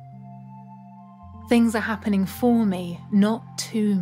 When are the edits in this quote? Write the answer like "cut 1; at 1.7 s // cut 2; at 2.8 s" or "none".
cut 1; at 1.5 s